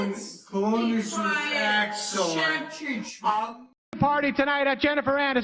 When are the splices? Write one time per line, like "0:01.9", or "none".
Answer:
0:04.0

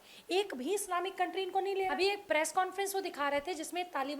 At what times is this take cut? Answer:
0:01.9

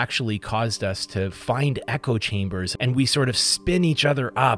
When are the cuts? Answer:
0:02.7

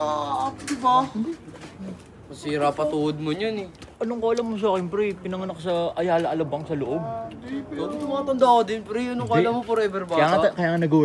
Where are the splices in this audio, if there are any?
none

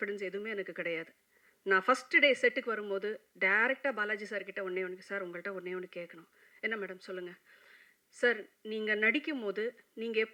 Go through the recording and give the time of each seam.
none

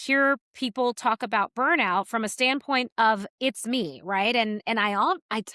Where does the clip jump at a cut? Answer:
none

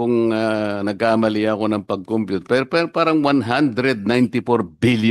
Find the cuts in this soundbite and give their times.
none

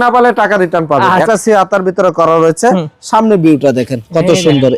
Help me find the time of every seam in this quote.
0:01.2

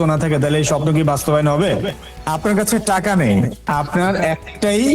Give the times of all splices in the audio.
0:02.0

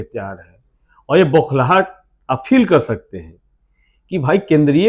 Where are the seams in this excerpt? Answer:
none

